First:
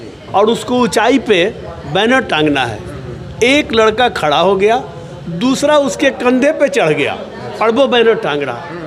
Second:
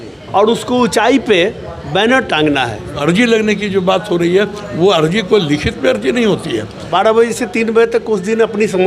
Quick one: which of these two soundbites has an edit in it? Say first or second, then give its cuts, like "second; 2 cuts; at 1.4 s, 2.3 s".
second; 2 cuts; at 3.0 s, 6.7 s